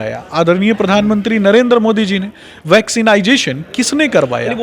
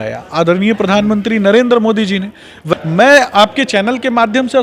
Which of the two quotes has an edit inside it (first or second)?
second